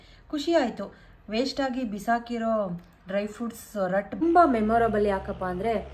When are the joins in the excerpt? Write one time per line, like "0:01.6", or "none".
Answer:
0:04.2